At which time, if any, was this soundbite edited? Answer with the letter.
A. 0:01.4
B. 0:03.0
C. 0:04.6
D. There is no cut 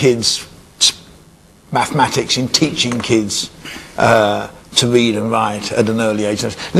C